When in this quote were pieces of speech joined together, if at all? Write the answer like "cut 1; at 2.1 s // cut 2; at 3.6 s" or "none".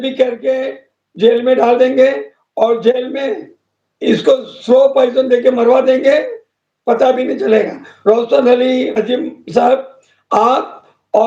cut 1; at 7.8 s // cut 2; at 8.9 s